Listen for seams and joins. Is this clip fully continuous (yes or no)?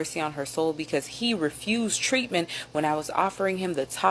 yes